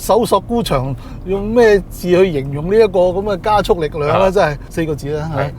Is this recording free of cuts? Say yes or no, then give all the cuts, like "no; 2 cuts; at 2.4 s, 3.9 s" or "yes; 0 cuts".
no; 1 cut; at 4.6 s